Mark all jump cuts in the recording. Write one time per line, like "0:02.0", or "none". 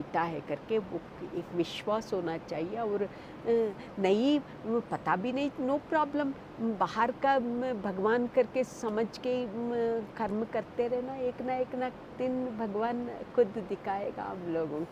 none